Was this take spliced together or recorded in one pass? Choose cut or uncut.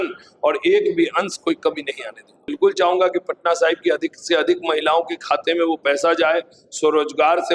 cut